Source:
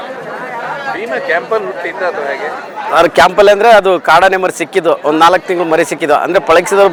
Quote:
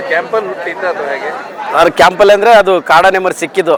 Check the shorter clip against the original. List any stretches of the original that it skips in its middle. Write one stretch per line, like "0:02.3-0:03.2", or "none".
none